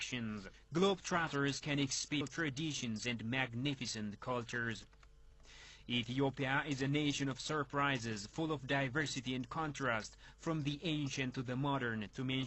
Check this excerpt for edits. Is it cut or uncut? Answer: uncut